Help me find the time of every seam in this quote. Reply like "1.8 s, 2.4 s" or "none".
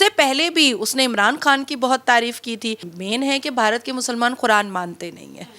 2.9 s